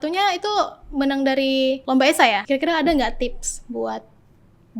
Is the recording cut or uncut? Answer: cut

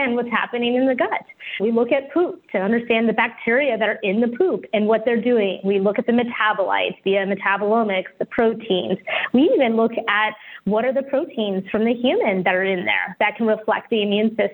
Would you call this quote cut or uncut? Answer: uncut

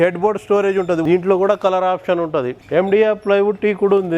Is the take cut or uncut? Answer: cut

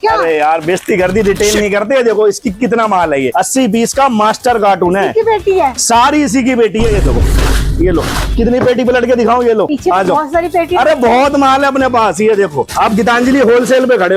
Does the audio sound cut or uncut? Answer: cut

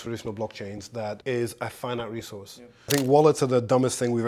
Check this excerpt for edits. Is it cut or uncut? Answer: cut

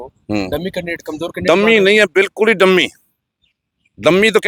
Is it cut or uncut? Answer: uncut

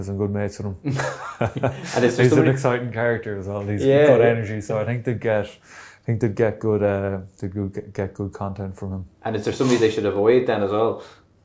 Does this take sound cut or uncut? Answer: uncut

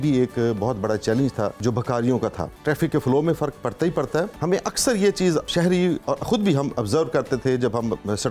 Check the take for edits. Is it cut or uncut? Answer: cut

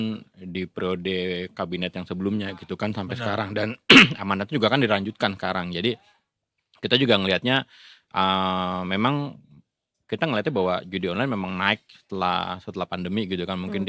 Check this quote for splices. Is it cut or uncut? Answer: uncut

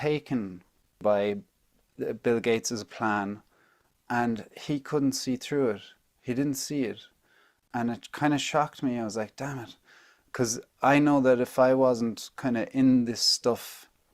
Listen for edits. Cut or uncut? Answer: cut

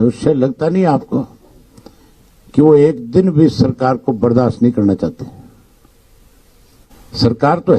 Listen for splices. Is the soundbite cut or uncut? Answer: cut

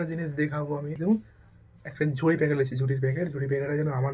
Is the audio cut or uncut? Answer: cut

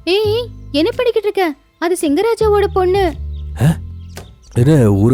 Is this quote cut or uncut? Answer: uncut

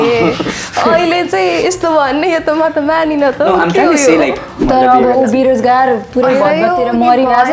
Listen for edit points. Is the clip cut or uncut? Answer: cut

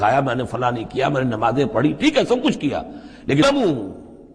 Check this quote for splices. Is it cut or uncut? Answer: cut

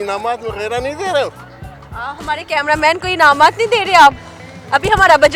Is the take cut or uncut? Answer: uncut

